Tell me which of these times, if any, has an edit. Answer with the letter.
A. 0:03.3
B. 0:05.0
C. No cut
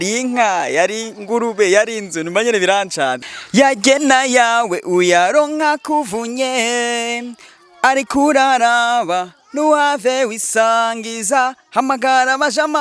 A